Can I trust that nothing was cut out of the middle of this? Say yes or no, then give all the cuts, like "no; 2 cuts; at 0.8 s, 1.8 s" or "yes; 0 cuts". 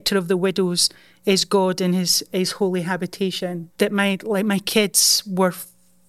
no; 1 cut; at 3.6 s